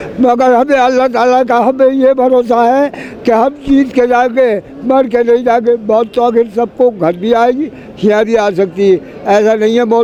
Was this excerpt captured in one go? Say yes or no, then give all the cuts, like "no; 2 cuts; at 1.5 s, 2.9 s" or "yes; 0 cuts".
yes; 0 cuts